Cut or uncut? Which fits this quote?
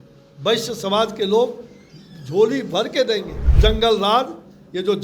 cut